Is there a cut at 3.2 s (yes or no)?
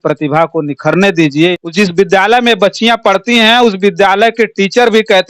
no